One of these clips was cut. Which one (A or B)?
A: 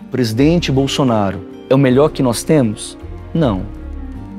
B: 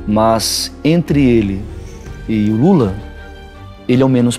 A